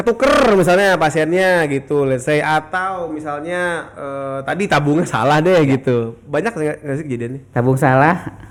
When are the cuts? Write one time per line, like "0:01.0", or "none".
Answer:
none